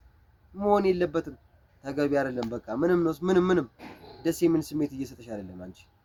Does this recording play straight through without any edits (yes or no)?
yes